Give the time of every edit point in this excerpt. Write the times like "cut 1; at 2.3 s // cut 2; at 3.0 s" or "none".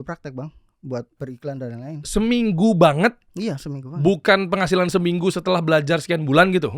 cut 1; at 1.2 s